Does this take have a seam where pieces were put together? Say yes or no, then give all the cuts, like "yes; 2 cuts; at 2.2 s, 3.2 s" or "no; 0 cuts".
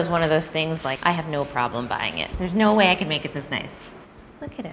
yes; 2 cuts; at 1.0 s, 2.2 s